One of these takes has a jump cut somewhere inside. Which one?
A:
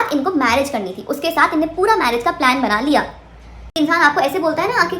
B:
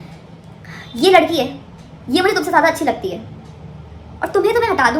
A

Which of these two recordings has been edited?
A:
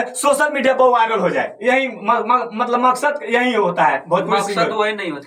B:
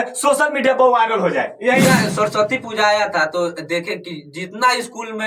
B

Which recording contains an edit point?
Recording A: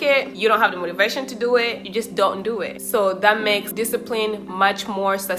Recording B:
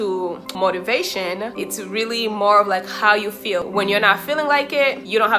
B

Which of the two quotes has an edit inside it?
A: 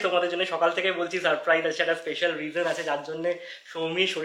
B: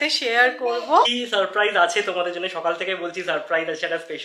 B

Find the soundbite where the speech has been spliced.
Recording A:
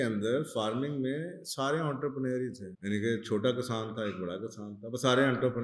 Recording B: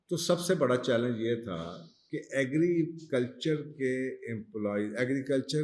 A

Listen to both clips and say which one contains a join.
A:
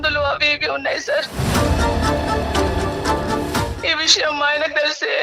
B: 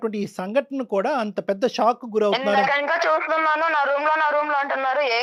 A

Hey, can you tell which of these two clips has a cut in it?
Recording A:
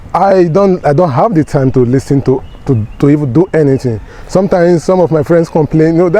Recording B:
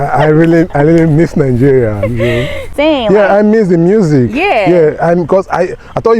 B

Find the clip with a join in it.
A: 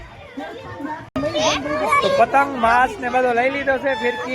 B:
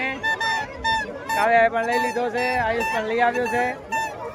A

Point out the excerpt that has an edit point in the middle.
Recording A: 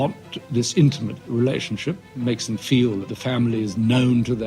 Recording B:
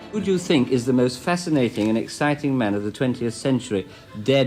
A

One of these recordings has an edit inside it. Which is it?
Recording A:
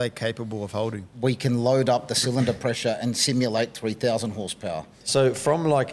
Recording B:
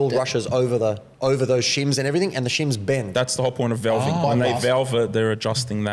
A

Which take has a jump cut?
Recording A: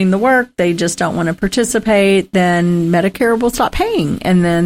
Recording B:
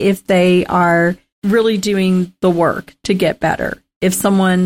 B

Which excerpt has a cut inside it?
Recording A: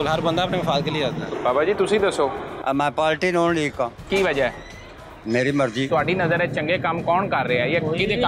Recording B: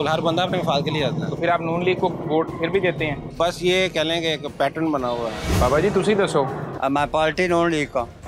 A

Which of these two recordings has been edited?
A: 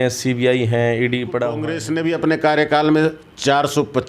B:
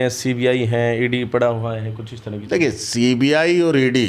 A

